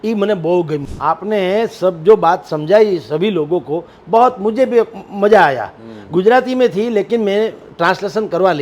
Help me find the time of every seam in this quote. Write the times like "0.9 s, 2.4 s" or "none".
0.9 s